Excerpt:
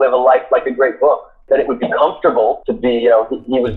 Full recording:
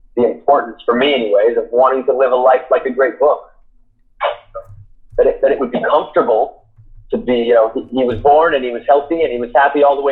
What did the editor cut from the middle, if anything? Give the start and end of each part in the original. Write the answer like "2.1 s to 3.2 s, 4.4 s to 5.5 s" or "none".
3.6 s to 5.4 s, 6.6 s to 7.1 s